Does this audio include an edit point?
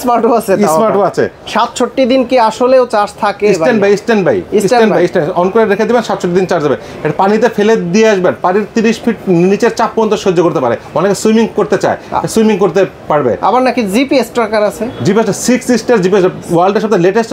yes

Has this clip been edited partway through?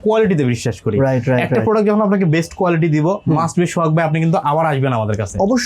no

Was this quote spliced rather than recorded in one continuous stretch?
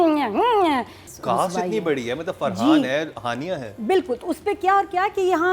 yes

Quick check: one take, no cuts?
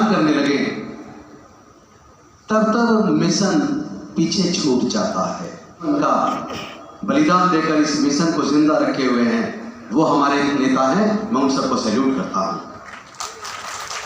no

